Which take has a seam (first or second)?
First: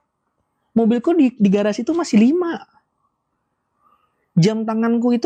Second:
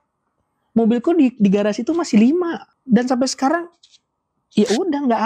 second